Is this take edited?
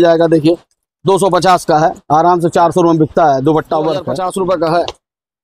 yes; 1 cut; at 4.1 s

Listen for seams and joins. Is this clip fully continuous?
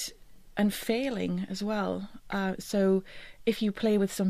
no; 1 cut; at 2.0 s

